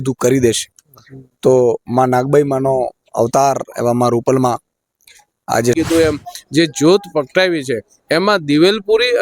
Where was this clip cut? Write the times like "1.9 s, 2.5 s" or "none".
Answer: 5.8 s

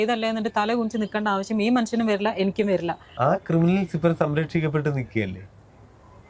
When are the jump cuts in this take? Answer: 3.1 s

